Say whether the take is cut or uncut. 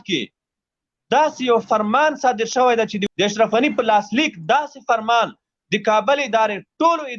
cut